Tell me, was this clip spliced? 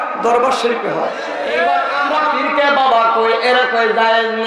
yes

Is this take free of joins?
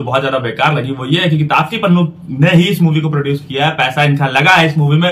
yes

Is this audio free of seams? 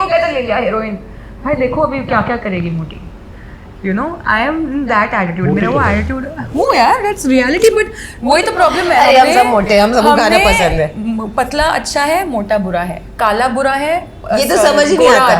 yes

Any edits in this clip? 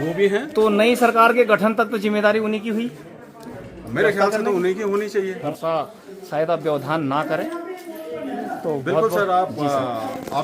yes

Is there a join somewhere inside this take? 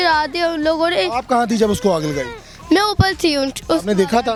no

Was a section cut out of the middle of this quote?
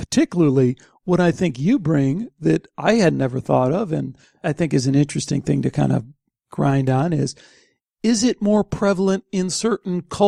no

